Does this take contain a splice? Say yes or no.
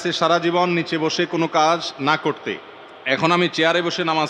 no